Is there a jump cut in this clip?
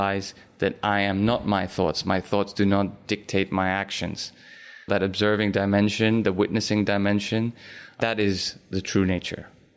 yes; 2 cuts; at 4.9 s, 7.9 s

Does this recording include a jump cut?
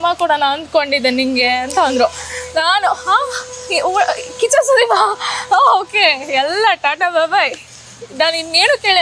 no; 0 cuts

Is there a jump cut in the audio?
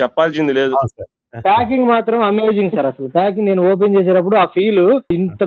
yes; 1 cut; at 1.0 s

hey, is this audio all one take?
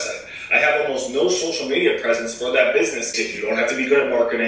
no; 1 cut; at 3.2 s

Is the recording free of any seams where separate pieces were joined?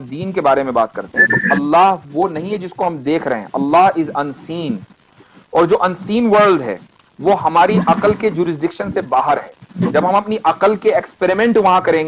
yes; 0 cuts

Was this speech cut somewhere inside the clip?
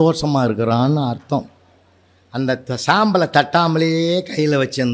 no; 0 cuts

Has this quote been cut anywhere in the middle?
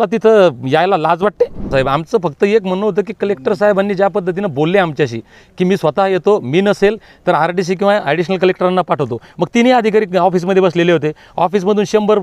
yes; 1 cut; at 1.7 s

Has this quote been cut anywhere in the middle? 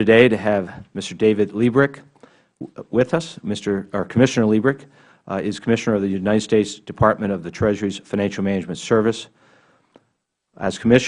yes; 1 cut; at 3.1 s

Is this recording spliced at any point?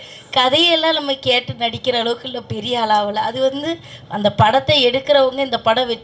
no; 0 cuts

